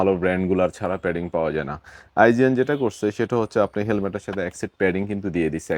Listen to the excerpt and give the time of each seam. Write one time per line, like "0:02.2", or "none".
none